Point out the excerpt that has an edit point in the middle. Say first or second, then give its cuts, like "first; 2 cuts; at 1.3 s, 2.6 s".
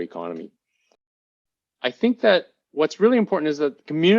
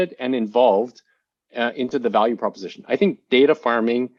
first; 1 cut; at 1.3 s